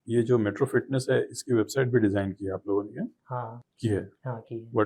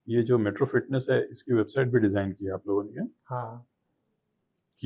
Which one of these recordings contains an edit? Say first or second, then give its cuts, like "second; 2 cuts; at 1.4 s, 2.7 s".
first; 1 cut; at 3.6 s